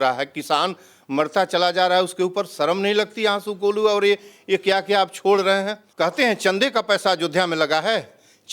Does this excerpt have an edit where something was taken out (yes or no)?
yes